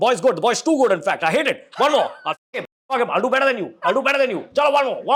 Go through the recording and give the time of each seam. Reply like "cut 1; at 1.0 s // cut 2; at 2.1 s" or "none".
none